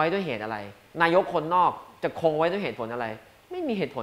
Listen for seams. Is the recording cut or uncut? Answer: uncut